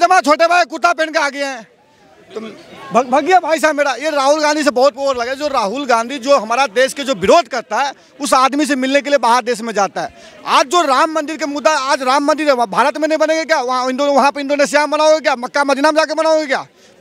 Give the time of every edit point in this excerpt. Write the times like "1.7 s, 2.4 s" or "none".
none

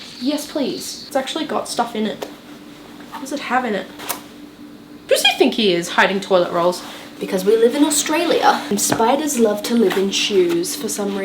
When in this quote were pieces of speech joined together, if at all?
0.9 s, 4.0 s, 7.1 s, 8.6 s

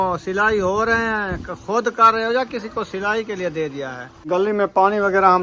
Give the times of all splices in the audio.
4.1 s

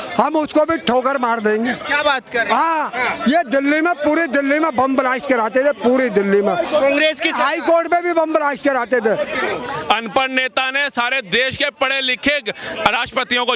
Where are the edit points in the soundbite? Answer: 9.3 s

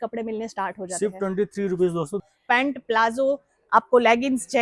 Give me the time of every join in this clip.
2.2 s

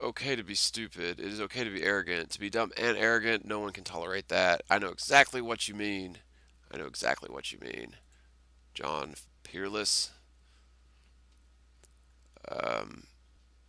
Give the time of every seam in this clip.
1.6 s

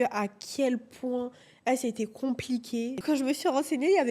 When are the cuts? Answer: 3.0 s

